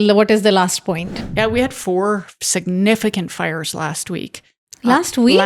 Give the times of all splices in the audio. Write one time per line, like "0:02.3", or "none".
0:01.2